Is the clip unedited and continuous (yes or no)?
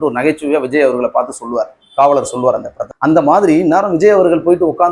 yes